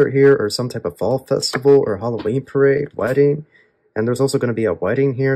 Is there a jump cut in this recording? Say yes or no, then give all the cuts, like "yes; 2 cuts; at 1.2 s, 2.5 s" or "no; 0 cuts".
no; 0 cuts